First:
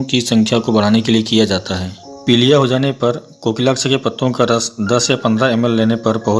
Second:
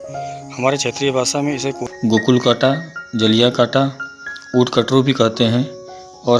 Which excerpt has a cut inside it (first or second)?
second